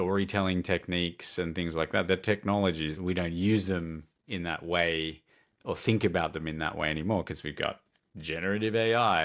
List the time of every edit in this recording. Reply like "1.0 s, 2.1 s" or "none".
3.0 s